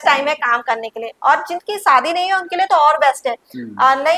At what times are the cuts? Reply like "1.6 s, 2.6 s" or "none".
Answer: none